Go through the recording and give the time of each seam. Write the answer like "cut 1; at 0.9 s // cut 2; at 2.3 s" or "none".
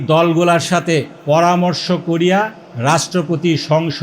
cut 1; at 1.1 s // cut 2; at 2.6 s